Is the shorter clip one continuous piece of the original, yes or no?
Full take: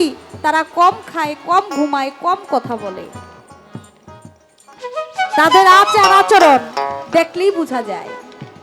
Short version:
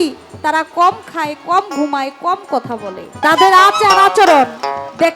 no